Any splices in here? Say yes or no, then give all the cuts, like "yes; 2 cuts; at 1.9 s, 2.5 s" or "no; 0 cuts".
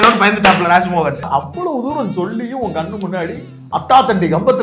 yes; 1 cut; at 1.2 s